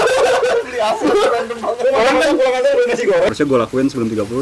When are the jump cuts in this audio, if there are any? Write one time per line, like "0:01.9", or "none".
0:03.3